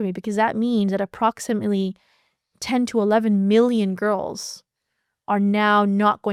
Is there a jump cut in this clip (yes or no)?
no